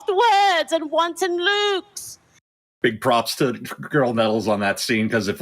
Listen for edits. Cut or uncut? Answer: cut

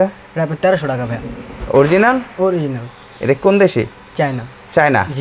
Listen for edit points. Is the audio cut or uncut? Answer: uncut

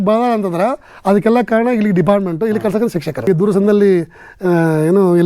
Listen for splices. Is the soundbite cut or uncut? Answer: cut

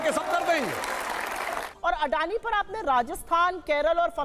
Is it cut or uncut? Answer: cut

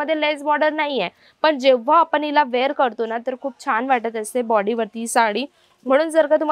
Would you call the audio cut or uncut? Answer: uncut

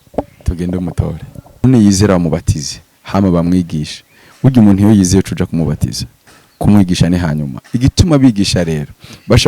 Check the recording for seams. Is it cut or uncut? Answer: cut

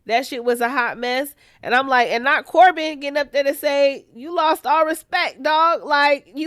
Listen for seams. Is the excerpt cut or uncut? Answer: uncut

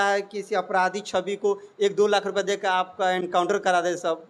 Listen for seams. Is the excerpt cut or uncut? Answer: uncut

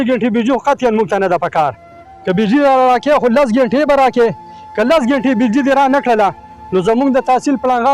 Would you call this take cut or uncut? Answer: uncut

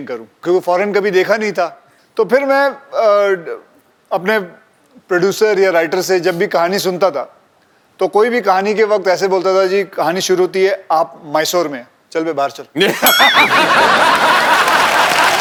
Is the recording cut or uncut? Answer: uncut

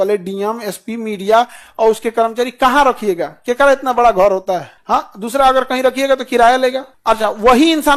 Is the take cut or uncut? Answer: uncut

